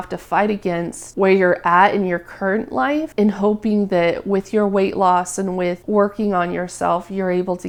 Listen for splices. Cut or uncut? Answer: uncut